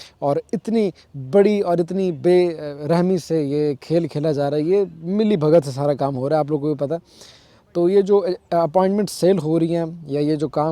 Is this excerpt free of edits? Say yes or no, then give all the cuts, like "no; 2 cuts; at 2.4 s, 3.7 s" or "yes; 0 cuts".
yes; 0 cuts